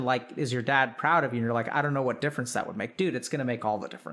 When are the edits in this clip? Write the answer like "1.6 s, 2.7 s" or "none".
none